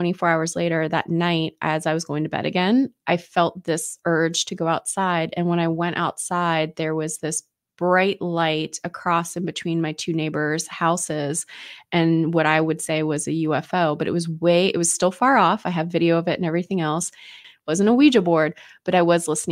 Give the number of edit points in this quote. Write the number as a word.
one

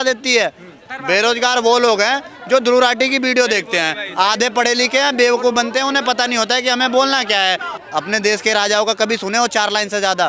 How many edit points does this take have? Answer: two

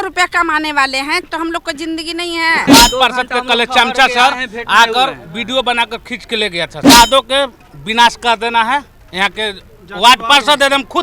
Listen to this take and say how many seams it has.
three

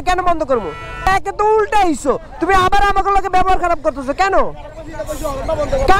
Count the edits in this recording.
one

